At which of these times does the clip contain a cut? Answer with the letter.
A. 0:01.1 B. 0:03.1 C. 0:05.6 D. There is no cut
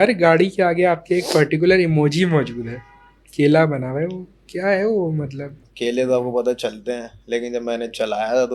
C